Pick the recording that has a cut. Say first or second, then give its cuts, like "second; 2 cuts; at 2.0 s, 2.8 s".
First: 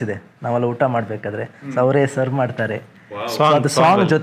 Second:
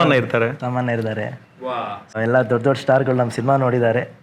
second; 1 cut; at 2.2 s